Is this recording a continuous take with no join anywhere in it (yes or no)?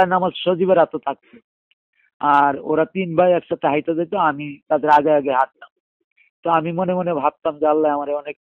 yes